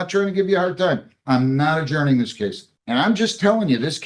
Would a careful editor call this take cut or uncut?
cut